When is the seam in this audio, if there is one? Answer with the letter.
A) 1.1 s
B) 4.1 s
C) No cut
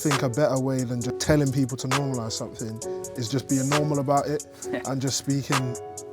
A